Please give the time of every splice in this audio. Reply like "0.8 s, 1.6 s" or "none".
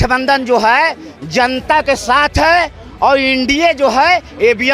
none